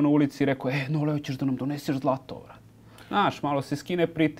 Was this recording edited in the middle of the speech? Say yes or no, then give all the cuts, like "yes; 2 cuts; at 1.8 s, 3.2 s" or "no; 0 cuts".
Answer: no; 0 cuts